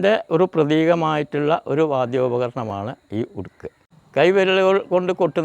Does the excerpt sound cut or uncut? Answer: cut